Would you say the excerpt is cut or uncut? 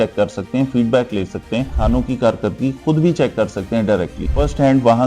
cut